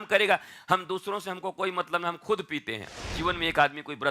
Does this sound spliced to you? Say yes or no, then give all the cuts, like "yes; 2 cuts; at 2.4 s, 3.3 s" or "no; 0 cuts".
yes; 1 cut; at 2.8 s